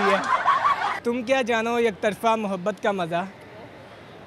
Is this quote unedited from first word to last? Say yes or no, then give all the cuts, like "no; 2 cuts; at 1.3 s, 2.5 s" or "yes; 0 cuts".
no; 1 cut; at 1.0 s